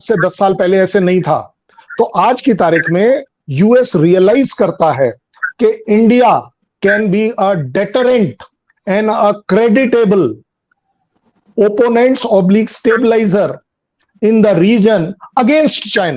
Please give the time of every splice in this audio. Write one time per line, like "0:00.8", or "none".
none